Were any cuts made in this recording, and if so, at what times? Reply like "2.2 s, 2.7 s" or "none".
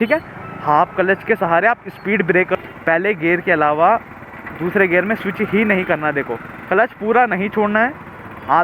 2.6 s